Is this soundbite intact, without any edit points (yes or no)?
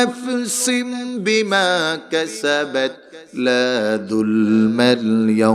yes